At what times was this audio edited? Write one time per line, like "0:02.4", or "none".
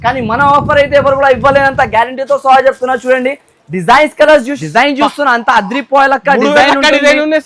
0:04.6